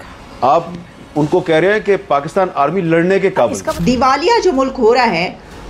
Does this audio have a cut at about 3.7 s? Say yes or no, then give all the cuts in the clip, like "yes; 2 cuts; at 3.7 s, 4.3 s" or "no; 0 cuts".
yes; 1 cut; at 3.7 s